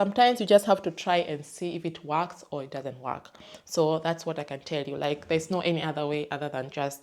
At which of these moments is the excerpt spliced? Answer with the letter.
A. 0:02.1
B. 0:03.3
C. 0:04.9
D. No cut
D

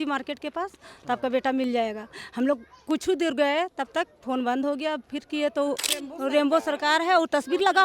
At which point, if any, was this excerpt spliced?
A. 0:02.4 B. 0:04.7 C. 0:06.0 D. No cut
C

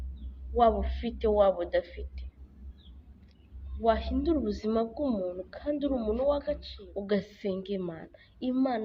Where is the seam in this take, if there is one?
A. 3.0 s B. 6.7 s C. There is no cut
B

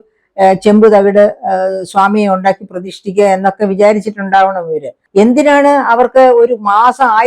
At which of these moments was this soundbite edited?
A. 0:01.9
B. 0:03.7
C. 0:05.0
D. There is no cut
C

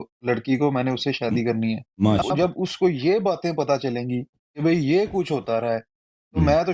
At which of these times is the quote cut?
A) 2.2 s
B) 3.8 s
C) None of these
A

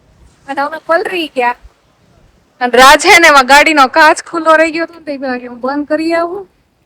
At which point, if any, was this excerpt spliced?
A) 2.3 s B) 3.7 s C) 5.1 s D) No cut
D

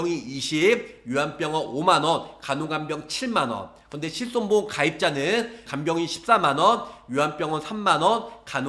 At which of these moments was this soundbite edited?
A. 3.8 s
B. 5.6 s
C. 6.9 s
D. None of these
B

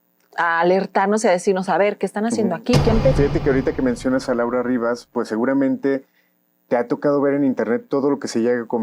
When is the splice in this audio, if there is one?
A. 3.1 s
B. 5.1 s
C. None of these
A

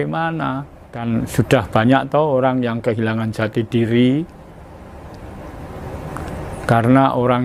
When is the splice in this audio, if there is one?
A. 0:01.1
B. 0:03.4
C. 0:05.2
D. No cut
A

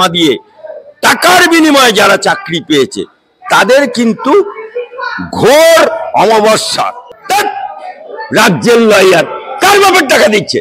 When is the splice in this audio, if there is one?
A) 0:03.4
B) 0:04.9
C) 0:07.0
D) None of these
C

